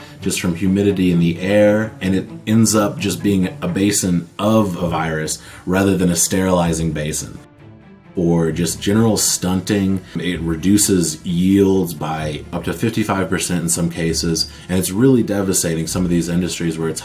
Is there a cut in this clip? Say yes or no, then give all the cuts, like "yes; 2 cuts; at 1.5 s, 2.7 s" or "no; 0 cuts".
yes; 3 cuts; at 7.8 s, 10.2 s, 12.5 s